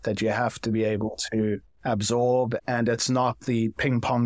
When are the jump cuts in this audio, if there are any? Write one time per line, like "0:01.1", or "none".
0:02.6

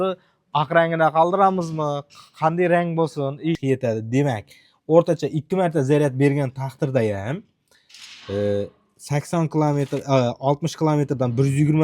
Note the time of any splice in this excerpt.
0:03.6

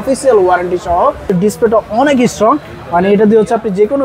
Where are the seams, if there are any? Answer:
0:01.3

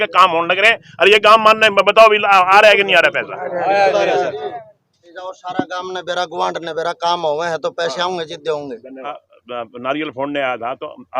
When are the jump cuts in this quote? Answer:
0:05.1
0:09.2

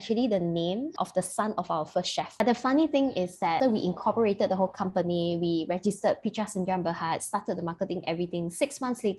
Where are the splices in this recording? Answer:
0:00.9
0:02.4
0:03.6

